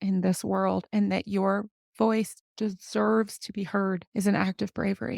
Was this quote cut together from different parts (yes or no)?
yes